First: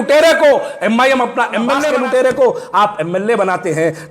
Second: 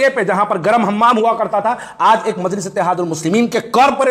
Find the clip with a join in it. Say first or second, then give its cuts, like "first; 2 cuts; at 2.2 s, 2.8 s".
first; 1 cut; at 1.9 s